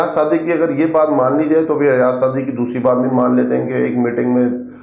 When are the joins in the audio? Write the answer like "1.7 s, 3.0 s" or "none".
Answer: none